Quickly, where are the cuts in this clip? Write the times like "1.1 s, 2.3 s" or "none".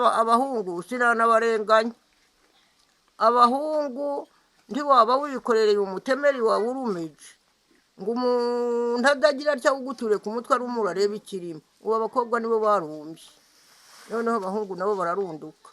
none